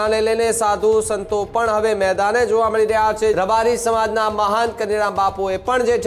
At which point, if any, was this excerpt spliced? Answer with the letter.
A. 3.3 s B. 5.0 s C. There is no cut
A